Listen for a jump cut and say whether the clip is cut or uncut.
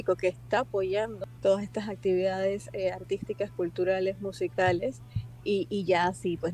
cut